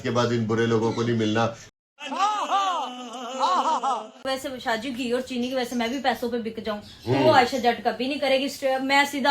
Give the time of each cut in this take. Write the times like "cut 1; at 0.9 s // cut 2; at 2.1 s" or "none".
cut 1; at 1.8 s // cut 2; at 4.2 s // cut 3; at 7.3 s